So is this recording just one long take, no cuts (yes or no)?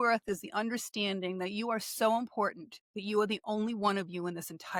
yes